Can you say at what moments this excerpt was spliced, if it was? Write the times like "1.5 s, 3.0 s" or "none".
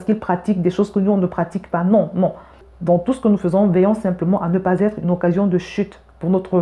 2.7 s